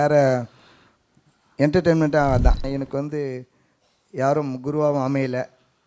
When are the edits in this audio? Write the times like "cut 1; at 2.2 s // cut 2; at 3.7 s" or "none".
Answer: cut 1; at 2.6 s